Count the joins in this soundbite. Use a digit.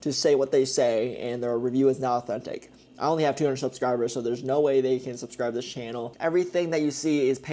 0